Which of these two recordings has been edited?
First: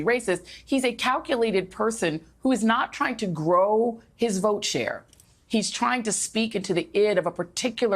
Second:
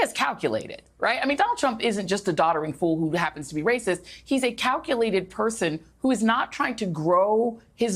first; 1 cut; at 5.3 s

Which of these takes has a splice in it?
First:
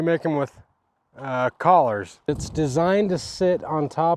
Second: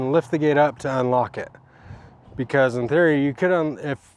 first; 1 cut; at 2.4 s

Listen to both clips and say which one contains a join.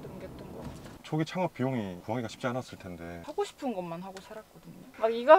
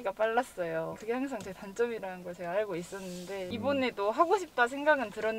first; 2 cuts; at 0.8 s, 3.2 s

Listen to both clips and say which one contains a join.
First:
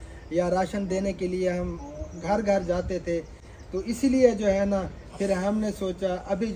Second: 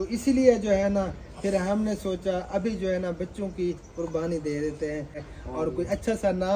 second; 1 cut; at 5.2 s

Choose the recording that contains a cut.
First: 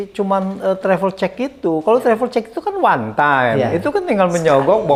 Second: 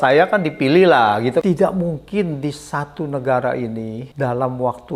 second; 2 cuts; at 1.4 s, 4.0 s

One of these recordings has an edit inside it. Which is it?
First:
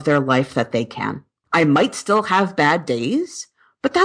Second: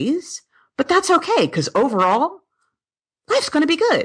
first; 1 cut; at 1.4 s

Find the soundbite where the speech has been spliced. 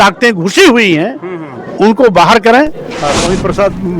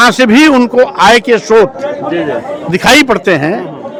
first; 1 cut; at 2.9 s

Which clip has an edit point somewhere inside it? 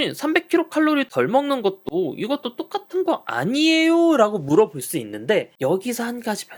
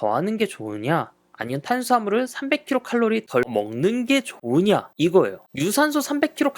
second; 1 cut; at 5.4 s

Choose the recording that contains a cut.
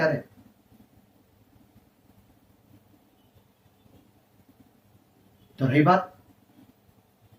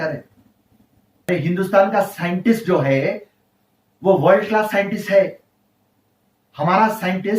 second; 1 cut; at 1.3 s

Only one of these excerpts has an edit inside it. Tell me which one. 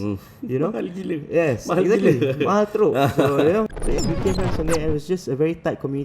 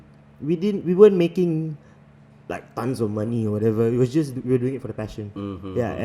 first; 1 cut; at 3.8 s

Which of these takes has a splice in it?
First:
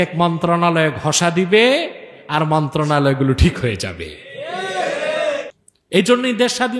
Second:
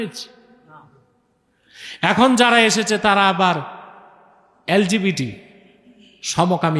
first; 1 cut; at 5.5 s

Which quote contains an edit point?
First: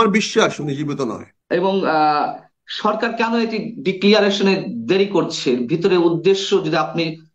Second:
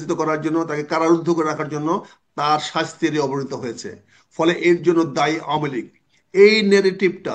first; 1 cut; at 1.3 s

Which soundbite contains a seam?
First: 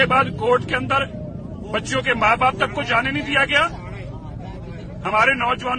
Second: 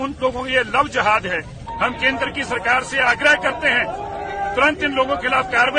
second; 1 cut; at 1.6 s

